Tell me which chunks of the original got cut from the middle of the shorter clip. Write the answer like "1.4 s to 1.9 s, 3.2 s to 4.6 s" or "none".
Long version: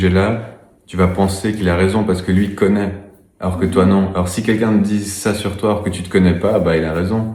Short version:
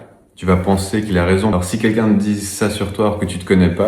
2.0 s to 4.2 s